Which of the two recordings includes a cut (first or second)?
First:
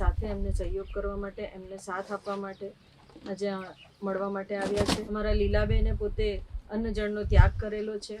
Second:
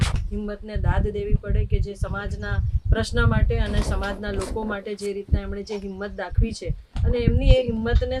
first